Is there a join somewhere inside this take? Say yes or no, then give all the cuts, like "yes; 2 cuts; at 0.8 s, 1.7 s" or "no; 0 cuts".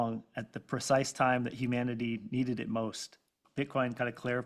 yes; 1 cut; at 3.4 s